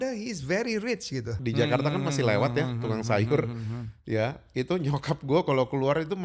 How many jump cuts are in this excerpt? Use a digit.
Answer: 1